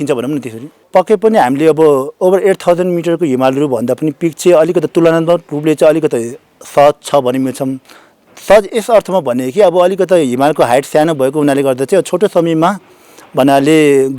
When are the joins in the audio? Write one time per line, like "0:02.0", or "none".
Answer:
none

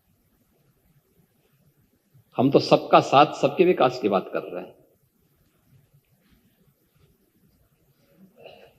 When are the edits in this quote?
none

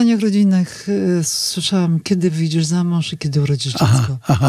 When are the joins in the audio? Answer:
none

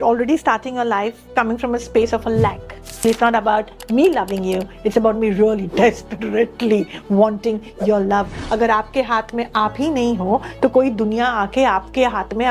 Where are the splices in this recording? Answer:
0:03.0
0:08.4

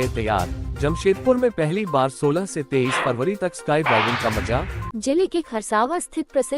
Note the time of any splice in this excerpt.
0:04.8

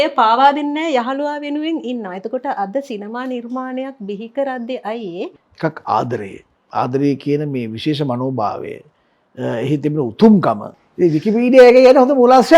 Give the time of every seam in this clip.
0:05.4
0:10.7

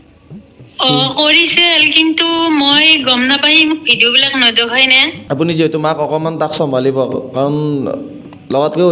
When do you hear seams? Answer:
0:05.1

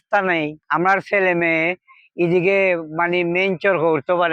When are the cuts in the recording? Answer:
none

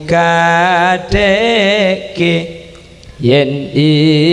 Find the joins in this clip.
none

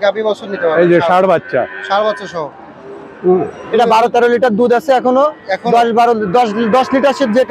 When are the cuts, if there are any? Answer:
0:03.6

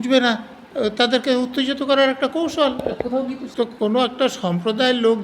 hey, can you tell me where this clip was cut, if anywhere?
0:03.4

